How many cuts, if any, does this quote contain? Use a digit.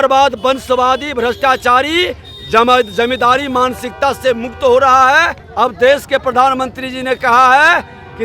1